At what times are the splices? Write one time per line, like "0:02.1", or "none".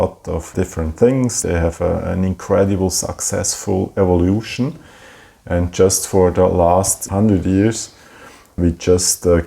0:01.4